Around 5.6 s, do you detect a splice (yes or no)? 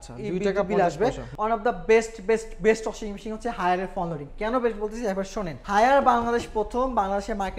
yes